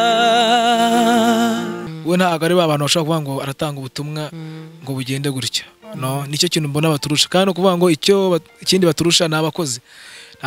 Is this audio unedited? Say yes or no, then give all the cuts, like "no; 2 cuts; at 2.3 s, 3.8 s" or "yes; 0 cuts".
no; 1 cut; at 1.8 s